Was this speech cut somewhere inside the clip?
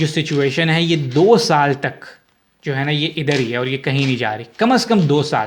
no; 0 cuts

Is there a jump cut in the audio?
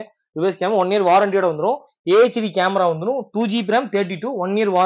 no; 0 cuts

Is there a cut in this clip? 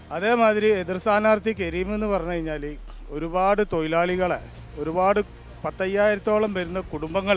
no; 0 cuts

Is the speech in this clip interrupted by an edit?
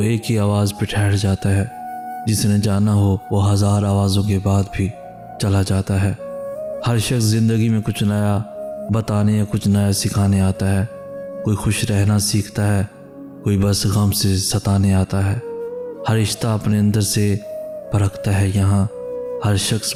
no; 0 cuts

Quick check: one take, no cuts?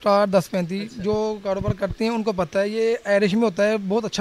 yes; 0 cuts

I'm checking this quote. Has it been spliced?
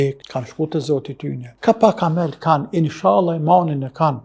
no; 0 cuts

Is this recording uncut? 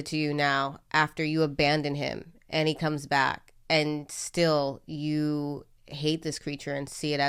yes; 0 cuts

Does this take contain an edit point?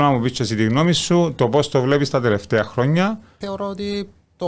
yes; 1 cut; at 3.4 s

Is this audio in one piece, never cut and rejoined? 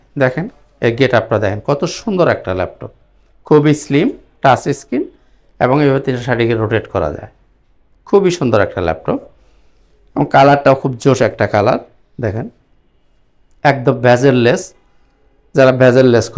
yes; 0 cuts

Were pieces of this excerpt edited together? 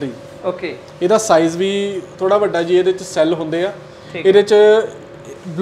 no; 0 cuts

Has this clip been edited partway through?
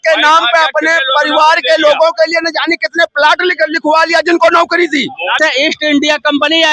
yes; 1 cut; at 5.4 s

